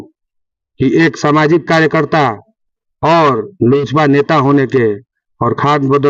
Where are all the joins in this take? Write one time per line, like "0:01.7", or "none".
none